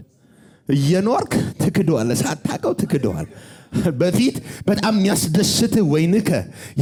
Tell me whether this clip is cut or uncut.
uncut